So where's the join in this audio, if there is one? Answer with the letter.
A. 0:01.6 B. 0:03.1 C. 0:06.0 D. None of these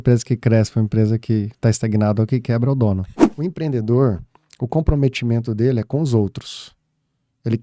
B